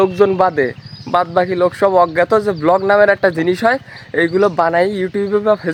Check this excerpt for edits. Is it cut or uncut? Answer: uncut